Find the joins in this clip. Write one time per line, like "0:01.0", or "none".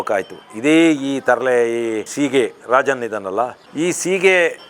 0:02.1
0:03.6